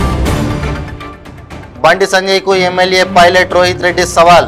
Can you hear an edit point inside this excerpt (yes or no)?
yes